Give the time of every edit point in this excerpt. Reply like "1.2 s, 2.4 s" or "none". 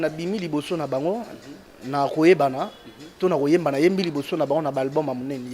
none